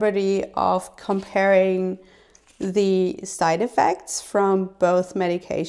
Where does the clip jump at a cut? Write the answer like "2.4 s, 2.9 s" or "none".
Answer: none